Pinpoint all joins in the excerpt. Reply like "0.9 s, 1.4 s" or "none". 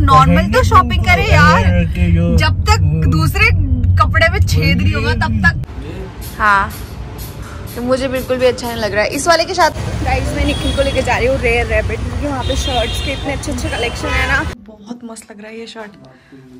5.7 s, 9.8 s, 14.6 s